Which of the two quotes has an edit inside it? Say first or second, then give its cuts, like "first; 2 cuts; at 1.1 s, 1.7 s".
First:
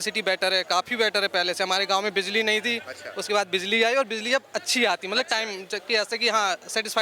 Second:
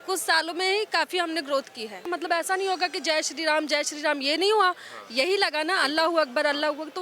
second; 1 cut; at 2.1 s